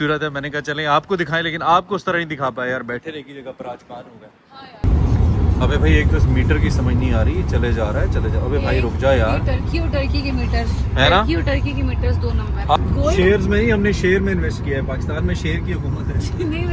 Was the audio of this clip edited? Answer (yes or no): yes